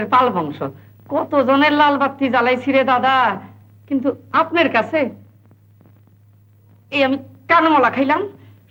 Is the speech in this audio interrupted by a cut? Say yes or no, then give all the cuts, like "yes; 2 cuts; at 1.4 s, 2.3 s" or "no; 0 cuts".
no; 0 cuts